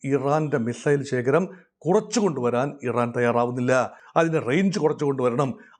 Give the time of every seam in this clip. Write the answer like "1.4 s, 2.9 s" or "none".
4.0 s